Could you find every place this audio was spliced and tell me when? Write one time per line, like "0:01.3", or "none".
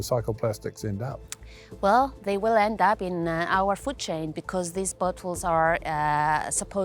none